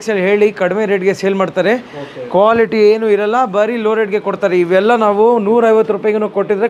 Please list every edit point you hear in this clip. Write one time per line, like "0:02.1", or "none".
none